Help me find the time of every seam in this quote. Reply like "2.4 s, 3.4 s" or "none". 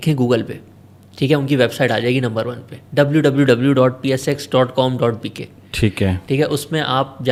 none